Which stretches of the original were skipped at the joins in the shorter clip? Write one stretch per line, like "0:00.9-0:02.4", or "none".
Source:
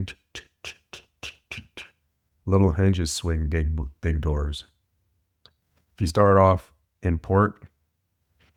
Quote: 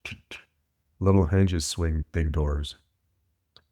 0:03.5-0:03.9